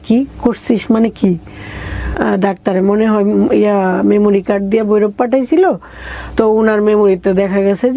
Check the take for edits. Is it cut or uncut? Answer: cut